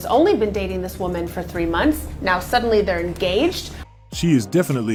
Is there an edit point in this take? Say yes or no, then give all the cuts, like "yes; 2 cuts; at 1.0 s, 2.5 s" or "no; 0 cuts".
no; 0 cuts